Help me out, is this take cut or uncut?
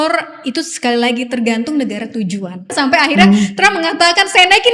cut